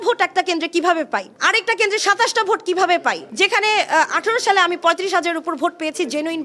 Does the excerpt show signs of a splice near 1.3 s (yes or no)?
yes